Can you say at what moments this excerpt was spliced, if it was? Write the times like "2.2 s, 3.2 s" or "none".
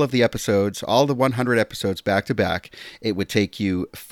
none

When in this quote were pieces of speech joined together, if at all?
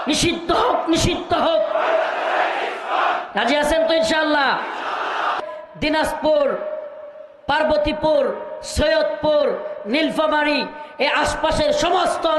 5.4 s

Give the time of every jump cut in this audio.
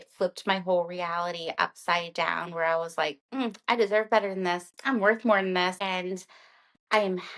4.7 s, 5.8 s

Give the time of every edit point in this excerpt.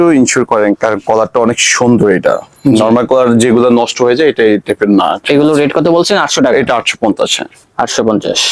none

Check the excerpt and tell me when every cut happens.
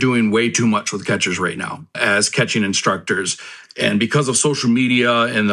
none

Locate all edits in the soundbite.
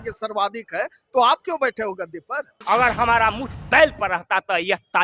2.6 s

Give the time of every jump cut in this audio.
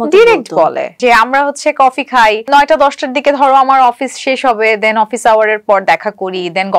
1.0 s, 2.4 s

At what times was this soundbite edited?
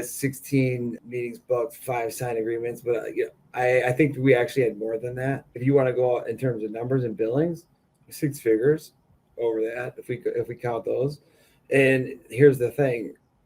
1.0 s, 1.8 s, 5.6 s

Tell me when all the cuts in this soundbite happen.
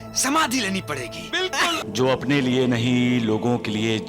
1.8 s

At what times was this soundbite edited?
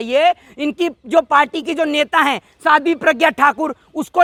none

